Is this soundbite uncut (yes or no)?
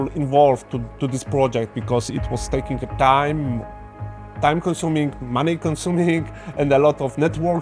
yes